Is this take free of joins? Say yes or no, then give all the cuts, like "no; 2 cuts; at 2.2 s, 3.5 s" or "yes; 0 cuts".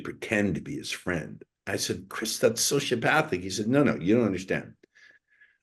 yes; 0 cuts